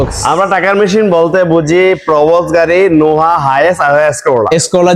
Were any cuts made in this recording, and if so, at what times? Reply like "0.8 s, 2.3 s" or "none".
none